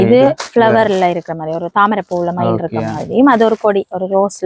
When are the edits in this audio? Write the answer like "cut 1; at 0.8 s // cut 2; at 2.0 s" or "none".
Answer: none